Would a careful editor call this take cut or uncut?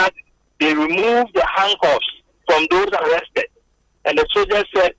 uncut